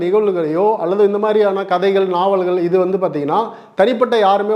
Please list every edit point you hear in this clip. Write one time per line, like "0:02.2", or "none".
none